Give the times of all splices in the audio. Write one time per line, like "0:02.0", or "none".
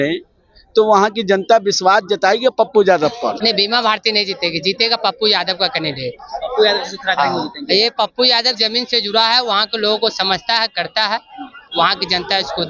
0:03.4